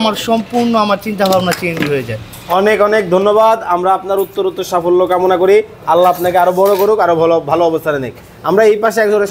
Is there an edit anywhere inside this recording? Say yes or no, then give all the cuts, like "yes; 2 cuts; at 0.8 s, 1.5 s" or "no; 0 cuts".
no; 0 cuts